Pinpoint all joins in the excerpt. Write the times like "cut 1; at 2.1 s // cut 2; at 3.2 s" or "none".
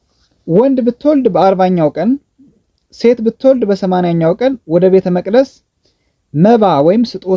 none